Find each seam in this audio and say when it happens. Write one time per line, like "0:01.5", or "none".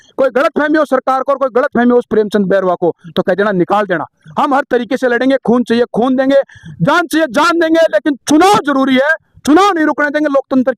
none